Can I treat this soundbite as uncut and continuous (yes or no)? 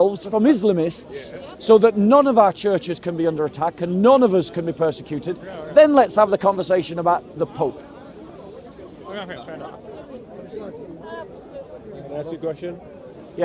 yes